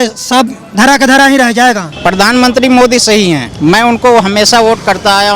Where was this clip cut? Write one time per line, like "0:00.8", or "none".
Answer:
0:01.9
0:03.5